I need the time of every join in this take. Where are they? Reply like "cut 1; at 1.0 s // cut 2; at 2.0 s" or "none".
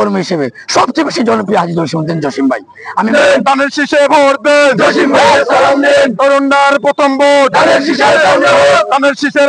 cut 1; at 3.0 s